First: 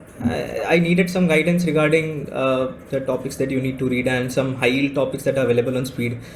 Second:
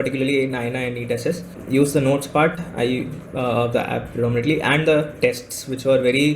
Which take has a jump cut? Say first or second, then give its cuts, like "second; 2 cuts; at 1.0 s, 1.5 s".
second; 1 cut; at 1.5 s